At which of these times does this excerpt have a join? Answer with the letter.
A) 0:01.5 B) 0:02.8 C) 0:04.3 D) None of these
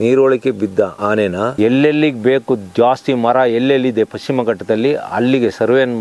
A